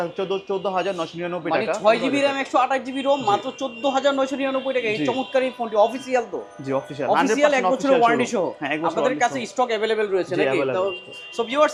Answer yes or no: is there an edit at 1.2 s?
no